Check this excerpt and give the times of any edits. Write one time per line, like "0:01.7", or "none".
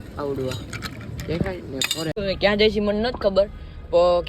0:02.2

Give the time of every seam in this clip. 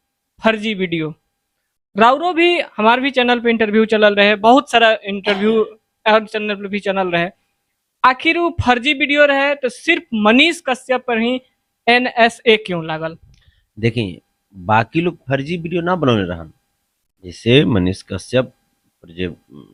none

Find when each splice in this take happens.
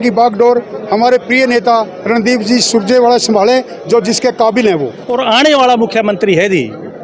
0:05.0

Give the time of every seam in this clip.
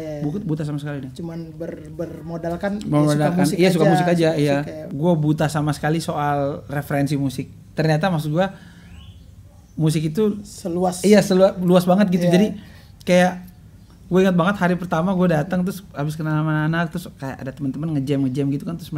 0:04.8

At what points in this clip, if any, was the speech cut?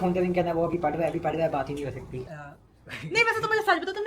0:02.2

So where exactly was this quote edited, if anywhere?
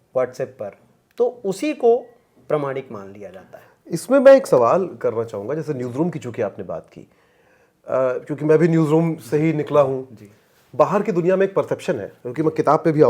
none

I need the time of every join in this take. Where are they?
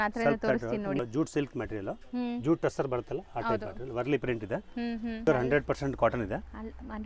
0:01.0
0:05.3

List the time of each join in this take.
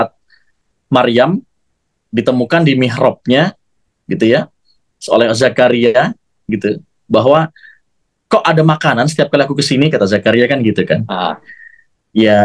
none

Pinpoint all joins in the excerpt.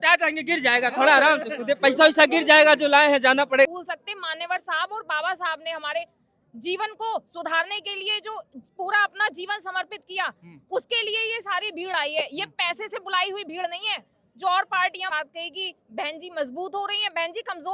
0:03.7
0:15.1

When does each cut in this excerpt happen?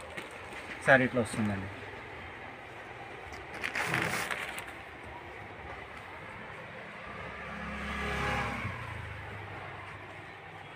none

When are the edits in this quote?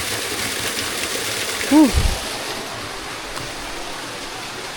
none

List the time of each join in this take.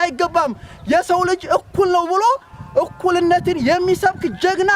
none

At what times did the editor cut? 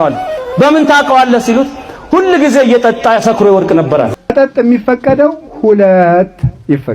0:04.2

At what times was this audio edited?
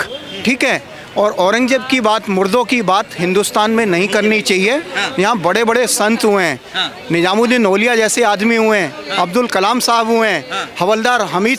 none

